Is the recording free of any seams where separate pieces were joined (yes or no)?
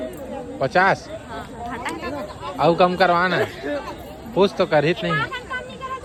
yes